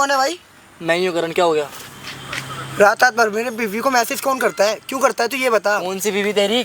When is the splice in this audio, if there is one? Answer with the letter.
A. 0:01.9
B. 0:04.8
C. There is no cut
C